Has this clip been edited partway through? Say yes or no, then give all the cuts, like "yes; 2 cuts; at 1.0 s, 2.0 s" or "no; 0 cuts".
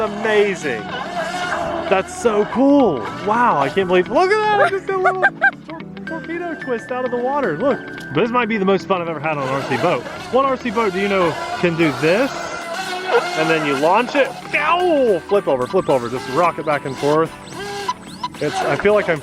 yes; 1 cut; at 8.1 s